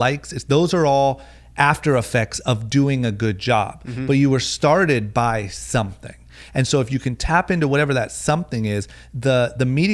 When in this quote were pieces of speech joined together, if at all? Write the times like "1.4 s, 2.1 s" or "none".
none